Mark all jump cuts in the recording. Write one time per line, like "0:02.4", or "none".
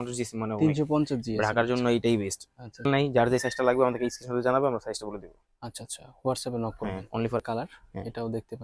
0:02.8
0:07.4